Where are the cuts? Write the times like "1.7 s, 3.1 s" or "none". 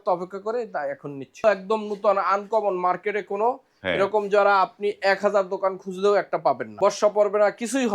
1.4 s, 6.7 s